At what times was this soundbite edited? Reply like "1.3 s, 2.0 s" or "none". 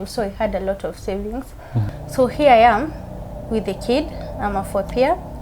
1.8 s